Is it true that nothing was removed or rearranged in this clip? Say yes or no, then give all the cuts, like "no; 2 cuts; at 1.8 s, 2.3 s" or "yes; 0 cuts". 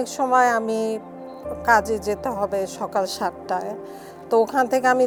yes; 0 cuts